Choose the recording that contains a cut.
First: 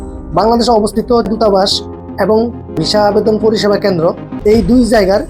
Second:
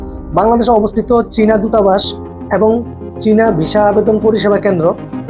first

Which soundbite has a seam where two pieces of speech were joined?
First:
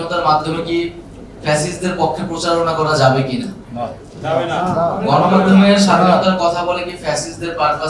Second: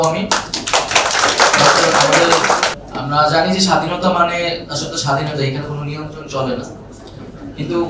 second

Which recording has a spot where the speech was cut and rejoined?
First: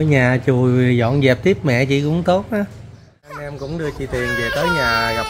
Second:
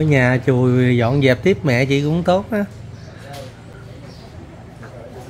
first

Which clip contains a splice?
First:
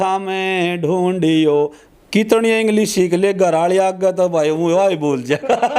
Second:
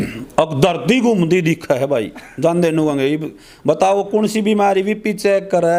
first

